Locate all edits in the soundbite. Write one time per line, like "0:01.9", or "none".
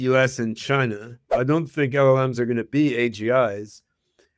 0:01.3